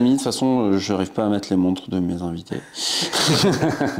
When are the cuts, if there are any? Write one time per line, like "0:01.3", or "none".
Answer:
none